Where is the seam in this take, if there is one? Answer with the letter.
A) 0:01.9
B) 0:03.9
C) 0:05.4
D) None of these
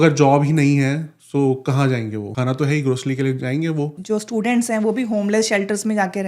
B